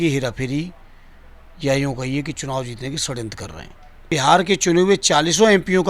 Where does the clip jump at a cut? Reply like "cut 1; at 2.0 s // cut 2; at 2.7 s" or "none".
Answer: cut 1; at 4.1 s